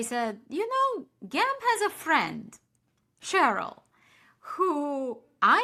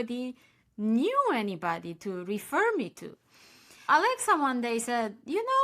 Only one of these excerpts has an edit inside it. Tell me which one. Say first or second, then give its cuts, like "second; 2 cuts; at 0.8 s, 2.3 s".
second; 1 cut; at 3.8 s